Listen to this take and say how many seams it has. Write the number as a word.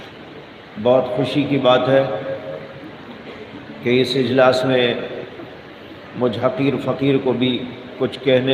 zero